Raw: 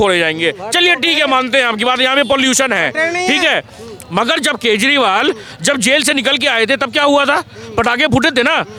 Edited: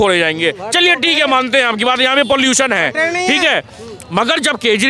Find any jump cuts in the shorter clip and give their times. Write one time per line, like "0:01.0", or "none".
none